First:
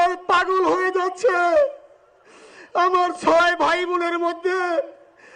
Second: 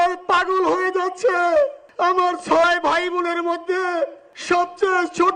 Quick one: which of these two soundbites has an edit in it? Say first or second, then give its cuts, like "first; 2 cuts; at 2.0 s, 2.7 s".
second; 2 cuts; at 1.8 s, 4.3 s